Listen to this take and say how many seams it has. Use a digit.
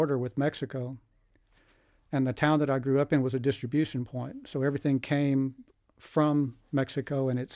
0